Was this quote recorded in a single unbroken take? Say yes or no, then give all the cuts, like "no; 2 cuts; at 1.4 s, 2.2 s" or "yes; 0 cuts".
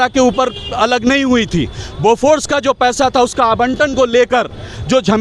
yes; 0 cuts